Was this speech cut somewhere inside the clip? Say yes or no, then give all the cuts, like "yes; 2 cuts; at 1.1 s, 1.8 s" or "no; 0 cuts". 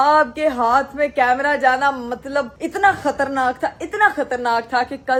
no; 0 cuts